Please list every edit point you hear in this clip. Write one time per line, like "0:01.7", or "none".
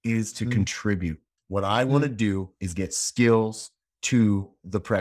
0:01.3